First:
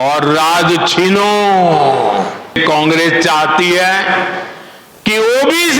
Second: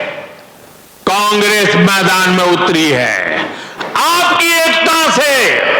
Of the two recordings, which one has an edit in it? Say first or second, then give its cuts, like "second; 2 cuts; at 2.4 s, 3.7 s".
first; 1 cut; at 2.6 s